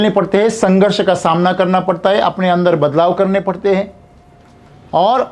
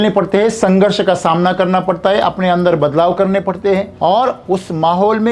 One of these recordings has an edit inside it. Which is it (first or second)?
second